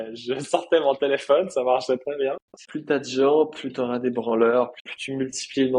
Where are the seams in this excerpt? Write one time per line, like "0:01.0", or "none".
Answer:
0:02.5
0:04.9